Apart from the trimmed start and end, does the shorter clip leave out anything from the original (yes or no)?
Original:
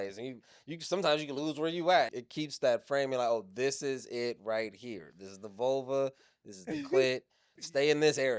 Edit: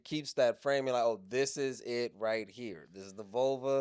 no